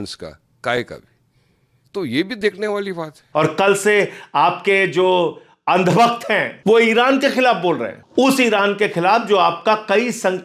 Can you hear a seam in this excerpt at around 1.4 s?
no; 3 cuts; at 3.1 s, 6.5 s, 8.0 s

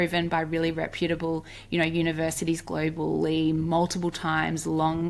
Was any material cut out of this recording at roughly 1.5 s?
no; 0 cuts

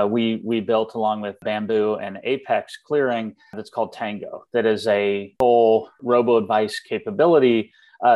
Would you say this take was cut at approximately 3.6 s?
yes; 4 cuts; at 1.4 s, 3.6 s, 5.3 s, 5.9 s

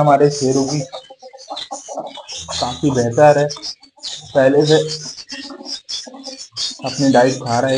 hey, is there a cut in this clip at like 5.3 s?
no; 0 cuts

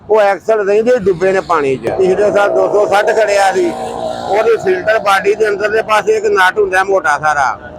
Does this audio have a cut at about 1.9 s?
yes; 1 cut; at 1.9 s

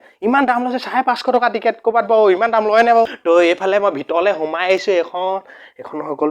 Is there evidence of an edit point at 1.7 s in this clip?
no; 1 cut; at 3.2 s

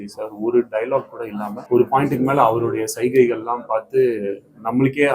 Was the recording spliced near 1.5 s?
yes; 1 cut; at 1.5 s

